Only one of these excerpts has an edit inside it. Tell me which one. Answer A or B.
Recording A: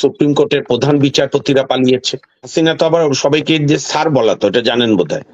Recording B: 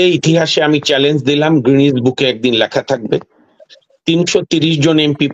A